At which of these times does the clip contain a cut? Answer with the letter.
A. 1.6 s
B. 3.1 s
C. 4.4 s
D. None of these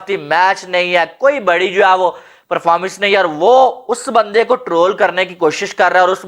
D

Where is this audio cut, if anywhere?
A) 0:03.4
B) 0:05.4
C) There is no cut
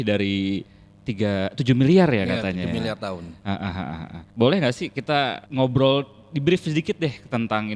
B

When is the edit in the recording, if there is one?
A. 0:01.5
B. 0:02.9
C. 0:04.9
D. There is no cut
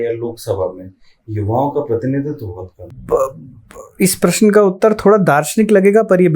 B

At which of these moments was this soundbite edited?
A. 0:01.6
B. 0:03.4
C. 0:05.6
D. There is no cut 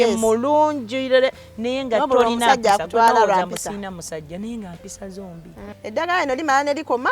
C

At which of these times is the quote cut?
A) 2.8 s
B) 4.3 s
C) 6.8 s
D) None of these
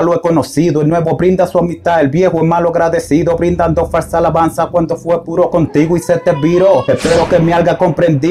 C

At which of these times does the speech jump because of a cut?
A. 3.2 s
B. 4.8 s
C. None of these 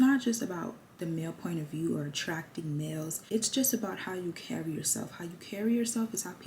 A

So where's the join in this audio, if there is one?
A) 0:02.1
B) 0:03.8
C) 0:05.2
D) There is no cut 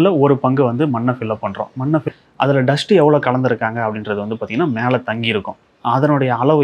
A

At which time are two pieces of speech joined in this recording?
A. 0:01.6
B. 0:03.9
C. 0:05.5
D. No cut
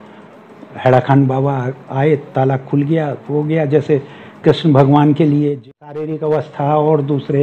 C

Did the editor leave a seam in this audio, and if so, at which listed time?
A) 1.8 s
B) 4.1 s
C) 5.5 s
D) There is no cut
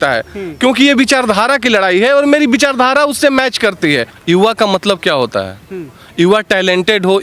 B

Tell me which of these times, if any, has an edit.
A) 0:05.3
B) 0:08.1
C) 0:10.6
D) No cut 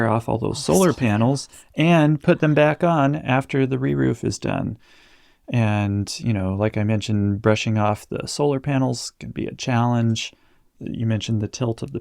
C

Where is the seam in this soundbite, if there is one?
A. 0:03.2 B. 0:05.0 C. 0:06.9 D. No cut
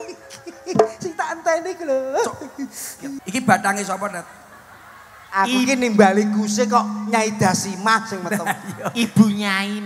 A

